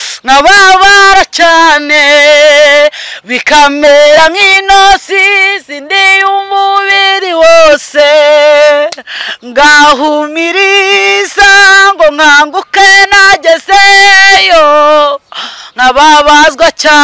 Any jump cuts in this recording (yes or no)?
no